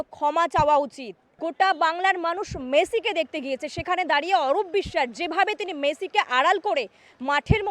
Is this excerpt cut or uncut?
cut